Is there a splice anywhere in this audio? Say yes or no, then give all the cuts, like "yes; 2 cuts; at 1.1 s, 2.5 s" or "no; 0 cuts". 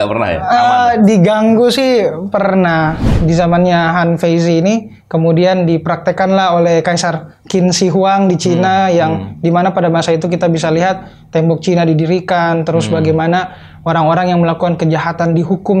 yes; 1 cut; at 3.1 s